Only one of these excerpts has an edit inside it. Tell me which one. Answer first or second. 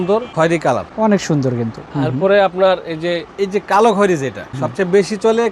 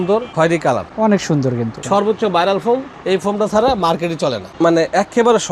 second